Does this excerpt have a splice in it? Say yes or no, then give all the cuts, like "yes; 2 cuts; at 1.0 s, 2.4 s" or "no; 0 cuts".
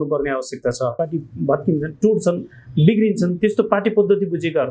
yes; 1 cut; at 0.9 s